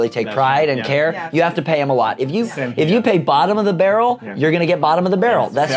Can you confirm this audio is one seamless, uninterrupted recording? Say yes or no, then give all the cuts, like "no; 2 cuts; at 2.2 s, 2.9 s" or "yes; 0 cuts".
yes; 0 cuts